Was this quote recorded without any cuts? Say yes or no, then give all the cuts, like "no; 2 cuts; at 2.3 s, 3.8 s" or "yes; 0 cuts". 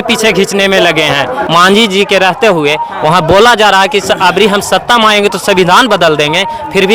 no; 1 cut; at 1.4 s